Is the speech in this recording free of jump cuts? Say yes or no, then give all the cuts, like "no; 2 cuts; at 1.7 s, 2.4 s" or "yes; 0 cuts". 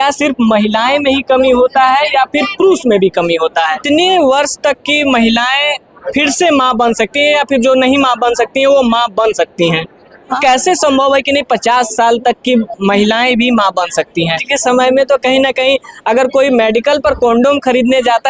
no; 3 cuts; at 3.8 s, 10.4 s, 14.4 s